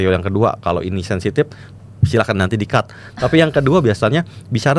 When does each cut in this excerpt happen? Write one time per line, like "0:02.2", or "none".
none